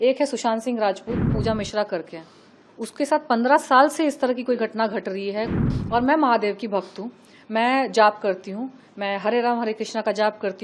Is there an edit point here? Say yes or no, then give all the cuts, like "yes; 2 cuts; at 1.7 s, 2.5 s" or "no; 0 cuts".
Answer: yes; 2 cuts; at 1.3 s, 5.6 s